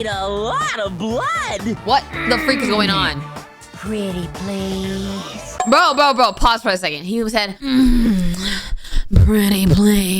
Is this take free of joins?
no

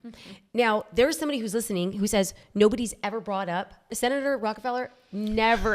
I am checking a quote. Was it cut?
yes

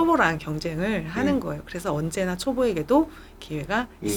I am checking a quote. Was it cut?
no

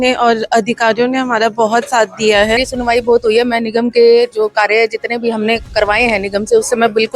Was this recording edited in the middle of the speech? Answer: yes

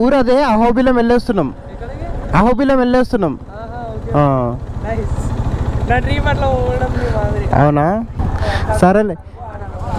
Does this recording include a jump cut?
yes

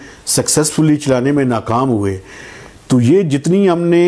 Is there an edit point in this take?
no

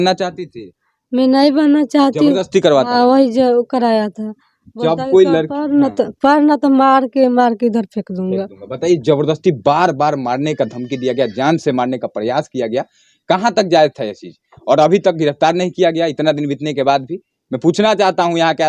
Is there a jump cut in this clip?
no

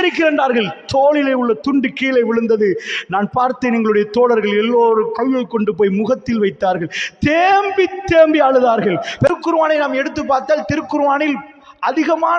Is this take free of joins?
no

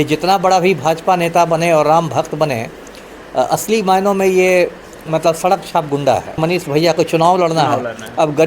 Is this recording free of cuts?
no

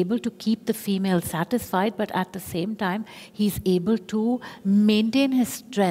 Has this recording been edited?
no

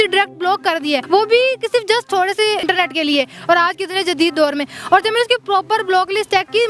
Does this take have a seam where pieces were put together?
yes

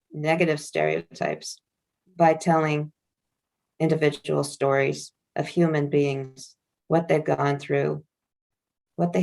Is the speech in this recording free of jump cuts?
yes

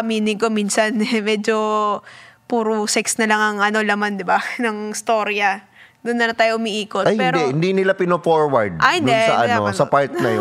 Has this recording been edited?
no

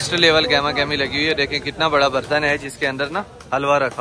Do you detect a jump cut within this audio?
no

